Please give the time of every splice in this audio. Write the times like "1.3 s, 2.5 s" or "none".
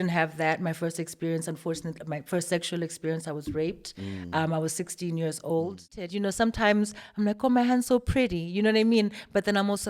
6.1 s